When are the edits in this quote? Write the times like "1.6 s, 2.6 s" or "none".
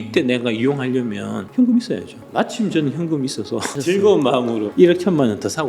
1.4 s, 2.2 s, 3.7 s, 4.6 s

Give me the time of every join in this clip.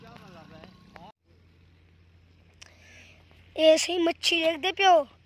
1.1 s

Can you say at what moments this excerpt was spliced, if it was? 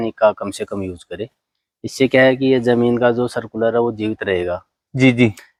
none

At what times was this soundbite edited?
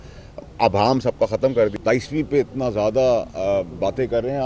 1.7 s

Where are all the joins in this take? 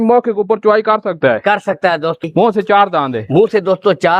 2.2 s

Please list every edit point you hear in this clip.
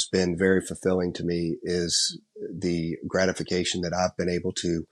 none

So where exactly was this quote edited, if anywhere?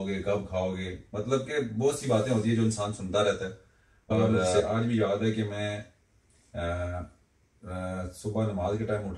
4.3 s

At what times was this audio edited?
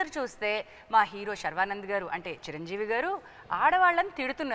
none

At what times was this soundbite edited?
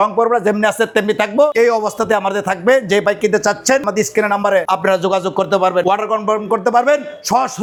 none

